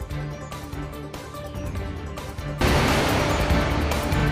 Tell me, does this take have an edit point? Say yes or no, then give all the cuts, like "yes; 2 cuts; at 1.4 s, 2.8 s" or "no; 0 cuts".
no; 0 cuts